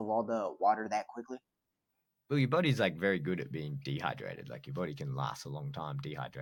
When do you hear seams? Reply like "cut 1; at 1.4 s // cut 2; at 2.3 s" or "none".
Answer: none